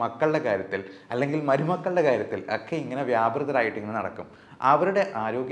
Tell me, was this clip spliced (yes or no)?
no